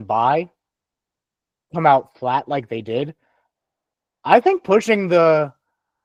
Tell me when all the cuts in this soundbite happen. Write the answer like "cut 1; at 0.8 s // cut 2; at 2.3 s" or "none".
none